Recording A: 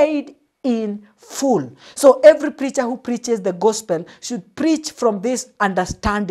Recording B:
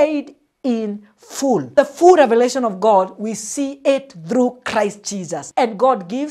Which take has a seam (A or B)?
B